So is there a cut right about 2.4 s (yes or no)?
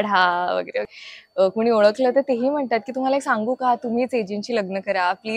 no